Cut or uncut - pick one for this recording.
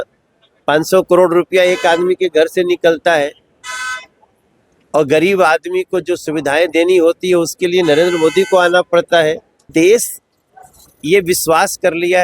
cut